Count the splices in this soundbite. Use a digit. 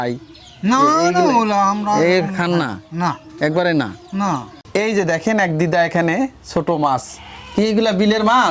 1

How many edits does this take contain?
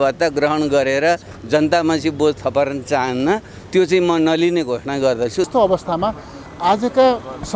1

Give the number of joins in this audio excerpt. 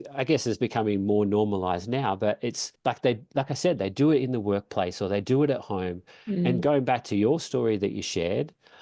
1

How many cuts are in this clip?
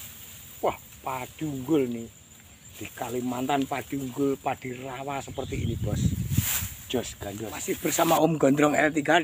1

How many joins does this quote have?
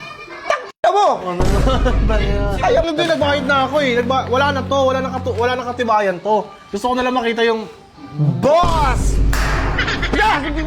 1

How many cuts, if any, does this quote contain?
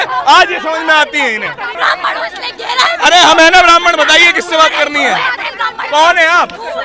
1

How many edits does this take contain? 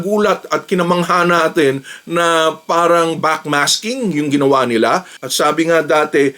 1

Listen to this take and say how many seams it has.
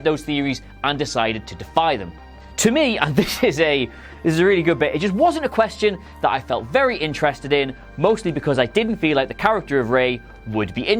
0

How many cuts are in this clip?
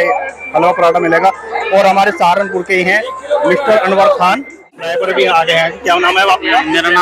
1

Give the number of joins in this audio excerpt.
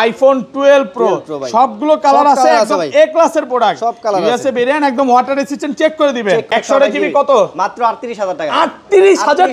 1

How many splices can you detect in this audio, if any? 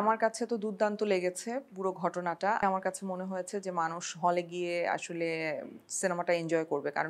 1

